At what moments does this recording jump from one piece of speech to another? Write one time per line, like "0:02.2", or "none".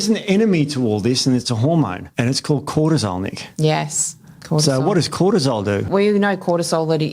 0:02.0
0:05.9